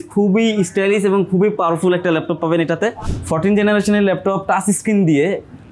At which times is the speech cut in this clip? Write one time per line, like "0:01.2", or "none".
0:03.1